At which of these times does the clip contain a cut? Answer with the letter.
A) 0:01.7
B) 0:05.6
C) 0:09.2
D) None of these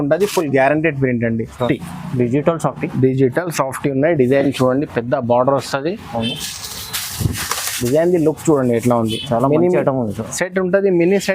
A